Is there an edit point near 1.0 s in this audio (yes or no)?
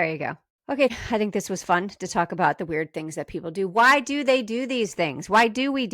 yes